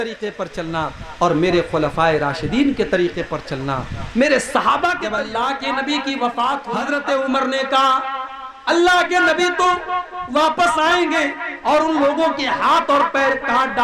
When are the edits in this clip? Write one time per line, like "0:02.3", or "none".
0:05.2
0:06.8